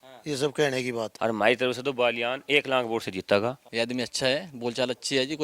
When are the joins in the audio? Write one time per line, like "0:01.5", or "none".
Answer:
0:01.1
0:03.6